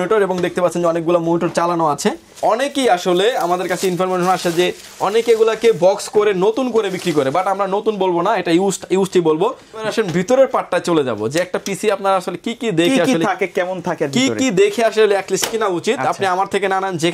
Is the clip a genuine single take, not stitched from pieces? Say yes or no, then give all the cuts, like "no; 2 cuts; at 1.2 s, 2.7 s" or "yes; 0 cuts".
no; 2 cuts; at 2.3 s, 9.8 s